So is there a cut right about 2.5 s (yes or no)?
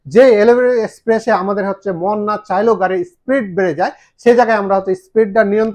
no